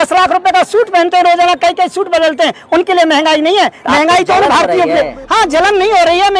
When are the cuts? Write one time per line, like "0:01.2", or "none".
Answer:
none